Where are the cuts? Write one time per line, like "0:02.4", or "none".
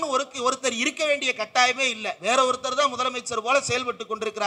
none